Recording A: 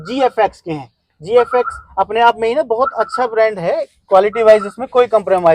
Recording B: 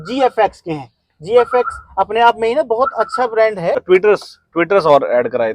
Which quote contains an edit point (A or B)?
B